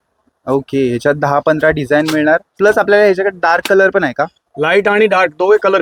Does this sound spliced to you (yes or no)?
no